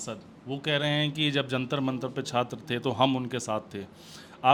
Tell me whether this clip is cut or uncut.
uncut